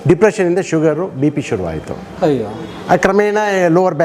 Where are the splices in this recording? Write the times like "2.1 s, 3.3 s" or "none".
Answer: none